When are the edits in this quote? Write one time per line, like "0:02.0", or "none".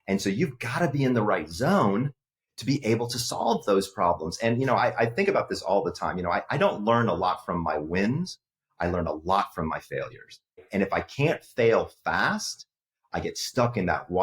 0:10.7